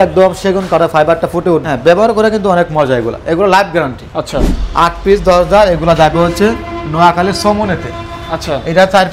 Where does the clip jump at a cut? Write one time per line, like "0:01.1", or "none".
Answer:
0:01.6
0:04.6